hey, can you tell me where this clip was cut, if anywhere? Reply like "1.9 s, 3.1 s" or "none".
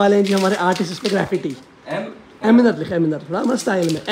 none